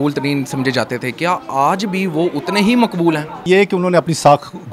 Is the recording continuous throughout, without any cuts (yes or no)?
no